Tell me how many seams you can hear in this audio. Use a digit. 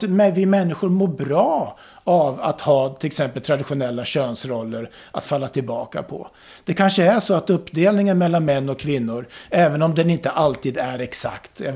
0